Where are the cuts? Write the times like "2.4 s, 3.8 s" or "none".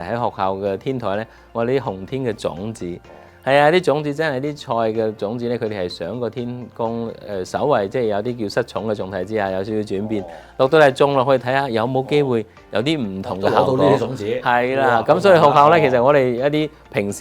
none